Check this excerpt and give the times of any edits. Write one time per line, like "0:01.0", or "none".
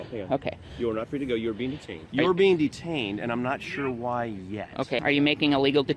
0:02.0
0:05.0